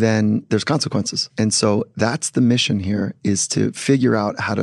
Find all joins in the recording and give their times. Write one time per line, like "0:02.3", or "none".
none